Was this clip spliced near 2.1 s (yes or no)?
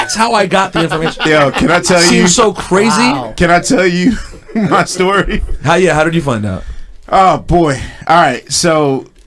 no